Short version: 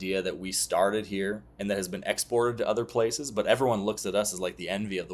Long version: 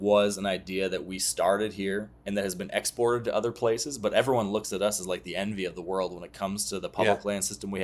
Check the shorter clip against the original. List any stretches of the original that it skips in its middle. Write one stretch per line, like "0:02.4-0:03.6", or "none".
none